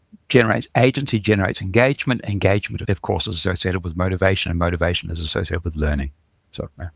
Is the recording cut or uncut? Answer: uncut